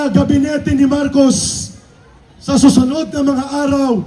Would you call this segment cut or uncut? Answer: uncut